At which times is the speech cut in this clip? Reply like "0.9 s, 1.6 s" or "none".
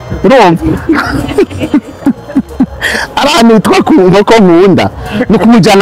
none